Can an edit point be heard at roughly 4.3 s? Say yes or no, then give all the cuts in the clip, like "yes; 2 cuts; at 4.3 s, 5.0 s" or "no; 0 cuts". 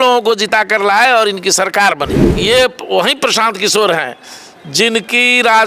no; 1 cut; at 2.3 s